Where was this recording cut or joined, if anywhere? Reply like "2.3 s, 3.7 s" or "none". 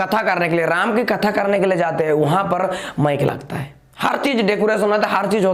none